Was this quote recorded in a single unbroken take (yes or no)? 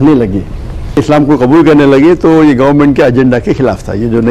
no